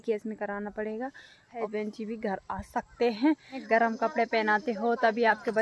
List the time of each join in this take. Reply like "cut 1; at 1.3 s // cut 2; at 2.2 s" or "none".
cut 1; at 1.6 s // cut 2; at 3.6 s